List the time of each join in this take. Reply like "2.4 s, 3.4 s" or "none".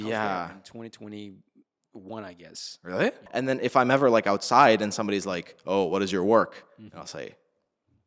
3.3 s